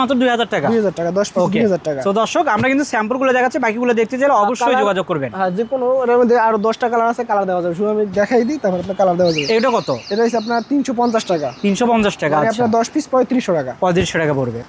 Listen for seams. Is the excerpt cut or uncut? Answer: uncut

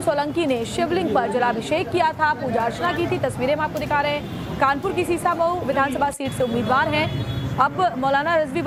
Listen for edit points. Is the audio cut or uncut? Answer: uncut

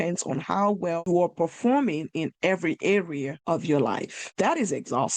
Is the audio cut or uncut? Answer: cut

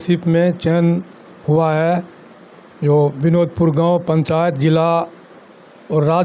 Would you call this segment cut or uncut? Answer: uncut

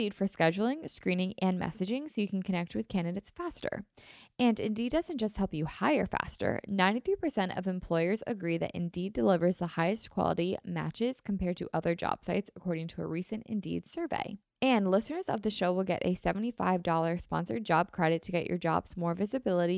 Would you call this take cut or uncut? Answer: cut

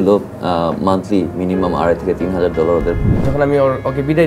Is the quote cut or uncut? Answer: cut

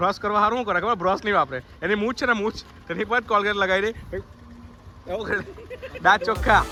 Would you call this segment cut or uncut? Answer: uncut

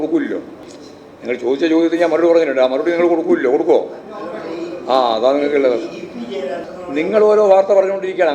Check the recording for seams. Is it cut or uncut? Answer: cut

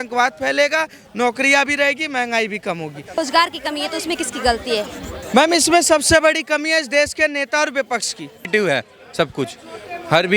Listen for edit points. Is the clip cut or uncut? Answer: cut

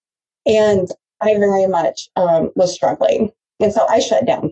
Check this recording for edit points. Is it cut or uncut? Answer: uncut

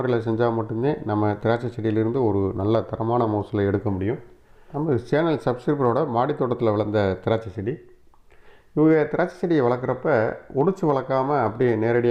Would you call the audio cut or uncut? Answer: cut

